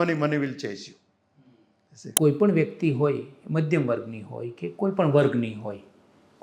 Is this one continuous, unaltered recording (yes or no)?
no